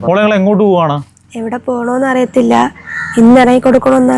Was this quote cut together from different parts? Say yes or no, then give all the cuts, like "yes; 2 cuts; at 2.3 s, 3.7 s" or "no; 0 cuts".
no; 0 cuts